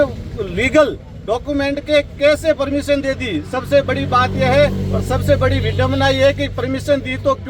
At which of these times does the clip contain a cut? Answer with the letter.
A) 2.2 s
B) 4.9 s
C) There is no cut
C